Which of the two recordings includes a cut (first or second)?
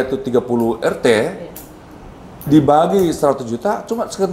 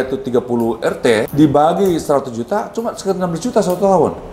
second